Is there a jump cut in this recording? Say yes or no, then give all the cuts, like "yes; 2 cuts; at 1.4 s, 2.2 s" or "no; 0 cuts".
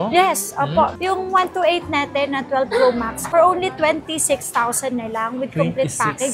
no; 0 cuts